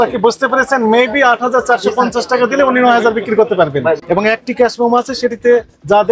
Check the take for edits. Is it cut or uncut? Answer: cut